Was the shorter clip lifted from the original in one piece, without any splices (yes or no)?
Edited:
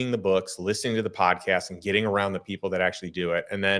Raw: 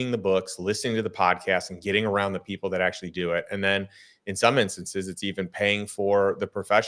yes